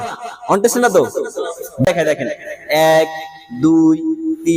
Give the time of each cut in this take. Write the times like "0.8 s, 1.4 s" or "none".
1.9 s